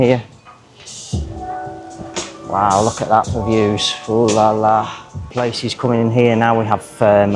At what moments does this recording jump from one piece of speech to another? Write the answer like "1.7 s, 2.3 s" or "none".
5.3 s